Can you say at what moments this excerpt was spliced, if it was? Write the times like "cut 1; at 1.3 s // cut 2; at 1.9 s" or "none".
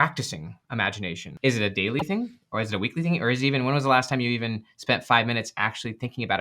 cut 1; at 1.2 s